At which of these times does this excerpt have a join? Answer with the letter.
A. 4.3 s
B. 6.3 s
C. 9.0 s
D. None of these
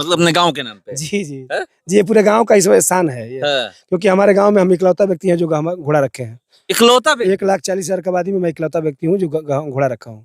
D